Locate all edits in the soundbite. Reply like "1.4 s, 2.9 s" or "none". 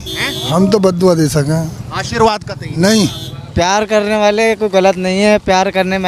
3.4 s